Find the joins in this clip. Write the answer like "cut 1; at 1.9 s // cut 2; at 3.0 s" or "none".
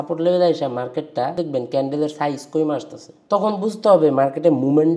cut 1; at 1.4 s